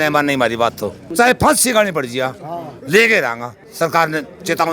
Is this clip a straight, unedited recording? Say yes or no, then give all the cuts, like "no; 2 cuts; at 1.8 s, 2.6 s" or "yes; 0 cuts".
no; 1 cut; at 1.0 s